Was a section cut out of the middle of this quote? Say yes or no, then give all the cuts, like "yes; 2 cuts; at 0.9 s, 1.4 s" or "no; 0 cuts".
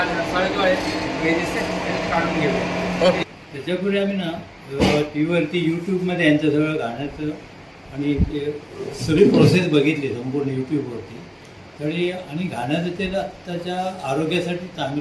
yes; 1 cut; at 3.2 s